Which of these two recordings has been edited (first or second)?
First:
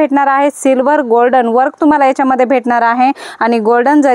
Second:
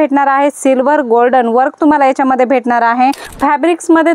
second